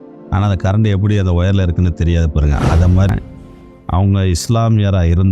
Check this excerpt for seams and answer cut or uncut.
cut